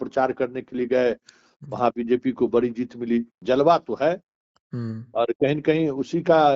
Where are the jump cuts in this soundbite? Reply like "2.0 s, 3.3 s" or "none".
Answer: 3.3 s